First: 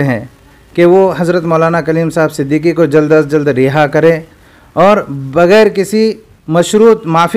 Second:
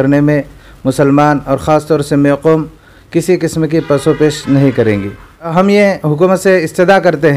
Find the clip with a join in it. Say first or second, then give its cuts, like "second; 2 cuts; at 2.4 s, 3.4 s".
second; 1 cut; at 5.5 s